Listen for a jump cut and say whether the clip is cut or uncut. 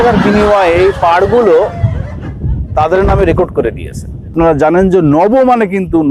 cut